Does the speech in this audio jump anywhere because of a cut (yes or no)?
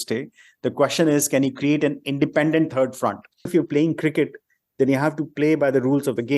yes